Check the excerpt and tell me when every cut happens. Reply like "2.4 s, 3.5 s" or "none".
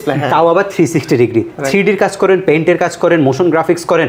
none